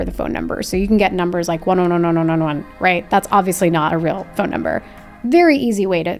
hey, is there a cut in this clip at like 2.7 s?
no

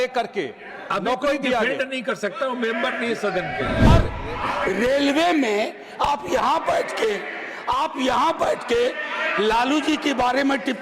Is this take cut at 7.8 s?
no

